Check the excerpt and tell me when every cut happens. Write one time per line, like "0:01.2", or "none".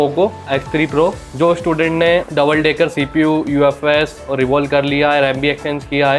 0:01.2
0:02.3